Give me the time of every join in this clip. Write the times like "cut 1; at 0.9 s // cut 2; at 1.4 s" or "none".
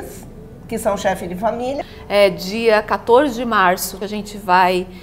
cut 1; at 1.9 s // cut 2; at 3.9 s